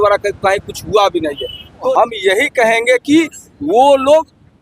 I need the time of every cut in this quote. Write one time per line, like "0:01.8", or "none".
0:01.9